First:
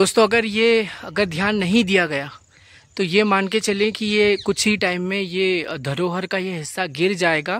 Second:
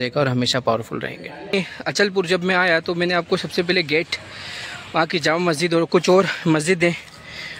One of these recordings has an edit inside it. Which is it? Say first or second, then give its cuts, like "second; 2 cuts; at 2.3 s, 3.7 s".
second; 1 cut; at 1.5 s